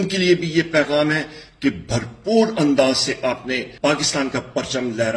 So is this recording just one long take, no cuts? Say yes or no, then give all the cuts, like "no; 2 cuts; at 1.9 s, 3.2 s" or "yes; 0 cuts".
no; 1 cut; at 3.7 s